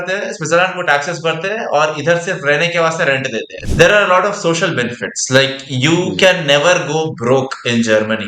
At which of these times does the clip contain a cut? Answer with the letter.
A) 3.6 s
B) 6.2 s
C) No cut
A